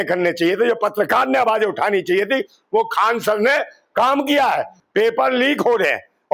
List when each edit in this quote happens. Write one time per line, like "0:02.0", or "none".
0:04.7